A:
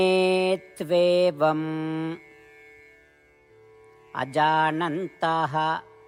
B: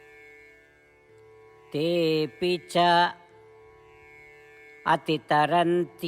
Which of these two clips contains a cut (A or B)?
B